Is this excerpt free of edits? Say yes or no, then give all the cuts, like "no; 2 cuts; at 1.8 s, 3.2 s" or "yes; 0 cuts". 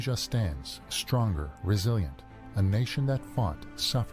yes; 0 cuts